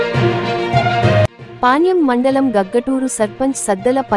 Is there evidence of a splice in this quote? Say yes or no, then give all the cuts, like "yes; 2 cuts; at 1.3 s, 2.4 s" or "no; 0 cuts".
yes; 1 cut; at 1.4 s